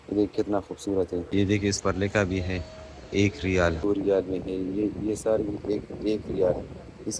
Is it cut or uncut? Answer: cut